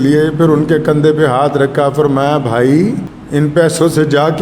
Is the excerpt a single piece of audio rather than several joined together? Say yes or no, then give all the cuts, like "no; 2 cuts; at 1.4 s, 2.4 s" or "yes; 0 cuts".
no; 1 cut; at 3.1 s